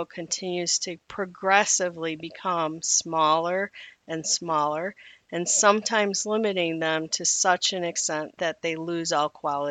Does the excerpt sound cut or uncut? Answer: cut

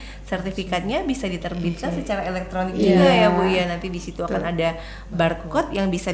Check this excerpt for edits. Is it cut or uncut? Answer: uncut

